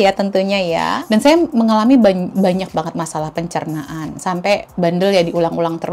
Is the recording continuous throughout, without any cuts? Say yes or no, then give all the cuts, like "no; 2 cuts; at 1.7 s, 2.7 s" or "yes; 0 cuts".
no; 1 cut; at 1.0 s